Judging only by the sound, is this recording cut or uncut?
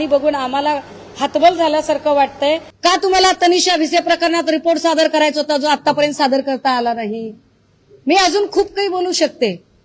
cut